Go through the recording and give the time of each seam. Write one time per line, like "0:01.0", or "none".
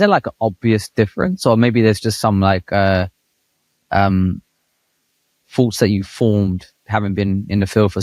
none

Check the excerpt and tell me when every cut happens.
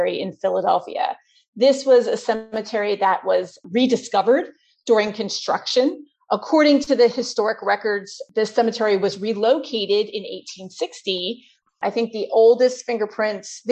0:11.6

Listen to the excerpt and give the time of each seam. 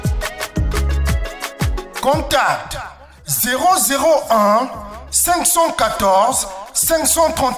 0:01.8

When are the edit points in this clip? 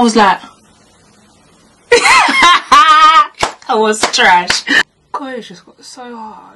0:04.7

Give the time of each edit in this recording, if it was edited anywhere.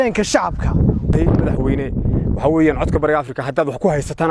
0:01.1

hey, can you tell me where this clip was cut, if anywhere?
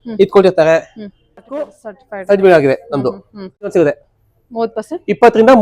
0:01.8
0:03.7

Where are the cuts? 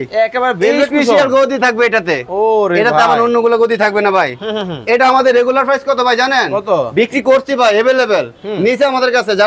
none

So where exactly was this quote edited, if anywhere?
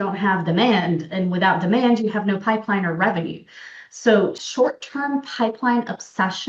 0:04.4

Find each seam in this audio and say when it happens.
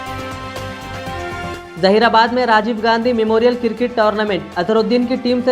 0:01.5

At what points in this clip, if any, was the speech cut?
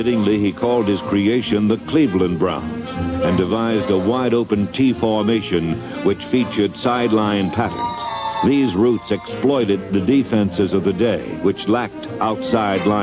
none

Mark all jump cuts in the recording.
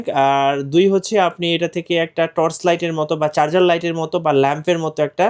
none

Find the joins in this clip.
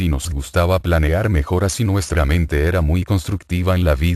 0:02.1

